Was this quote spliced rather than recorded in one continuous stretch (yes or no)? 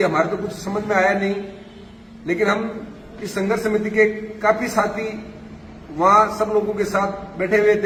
no